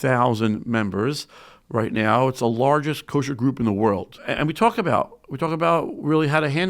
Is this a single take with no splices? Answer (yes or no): no